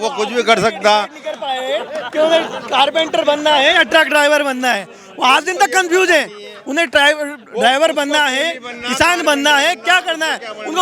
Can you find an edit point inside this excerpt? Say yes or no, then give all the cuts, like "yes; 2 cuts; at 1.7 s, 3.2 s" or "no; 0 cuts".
no; 0 cuts